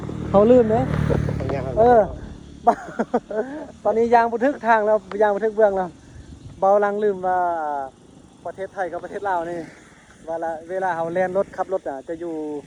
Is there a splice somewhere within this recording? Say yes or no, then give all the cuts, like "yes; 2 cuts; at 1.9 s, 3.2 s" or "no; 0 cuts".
no; 0 cuts